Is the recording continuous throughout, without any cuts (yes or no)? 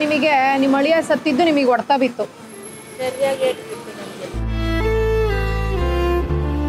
yes